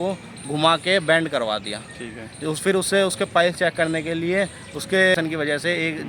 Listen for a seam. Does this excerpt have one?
yes; 1 cut; at 5.1 s

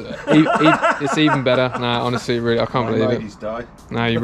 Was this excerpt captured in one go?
yes; 0 cuts

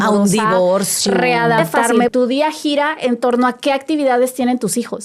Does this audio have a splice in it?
yes; 1 cut; at 2.1 s

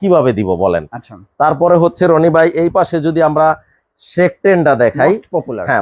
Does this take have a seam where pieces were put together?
no; 0 cuts

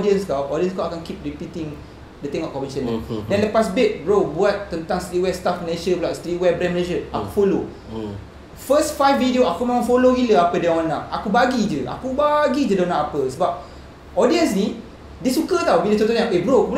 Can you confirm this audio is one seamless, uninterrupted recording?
yes; 0 cuts

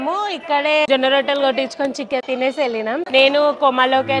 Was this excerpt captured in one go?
no; 1 cut; at 3.1 s

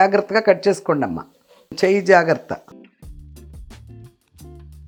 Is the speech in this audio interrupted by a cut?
no; 0 cuts

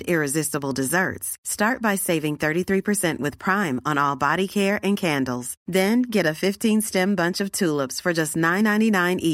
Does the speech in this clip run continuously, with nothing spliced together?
yes; 0 cuts

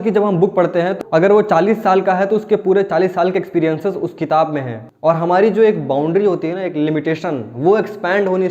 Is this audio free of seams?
no; 2 cuts; at 1.0 s, 4.8 s

